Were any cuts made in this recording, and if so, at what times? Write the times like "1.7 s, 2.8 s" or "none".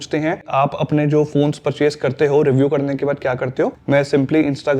3.8 s